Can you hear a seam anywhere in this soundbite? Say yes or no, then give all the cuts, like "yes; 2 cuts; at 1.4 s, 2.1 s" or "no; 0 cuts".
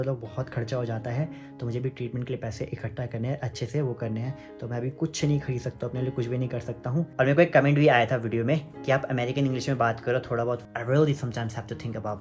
yes; 2 cuts; at 7.1 s, 10.6 s